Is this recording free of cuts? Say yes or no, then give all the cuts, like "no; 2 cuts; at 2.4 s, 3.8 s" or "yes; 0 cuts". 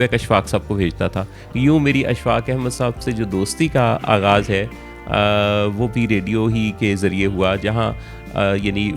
yes; 0 cuts